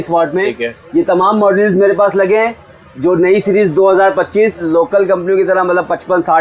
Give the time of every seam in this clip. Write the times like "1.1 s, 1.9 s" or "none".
4.6 s